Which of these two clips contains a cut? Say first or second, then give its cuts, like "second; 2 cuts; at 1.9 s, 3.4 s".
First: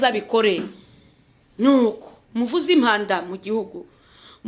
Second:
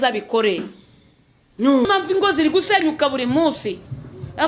second; 1 cut; at 1.9 s